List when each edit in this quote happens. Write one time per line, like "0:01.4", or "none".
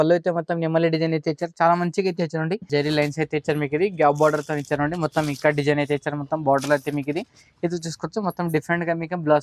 0:02.7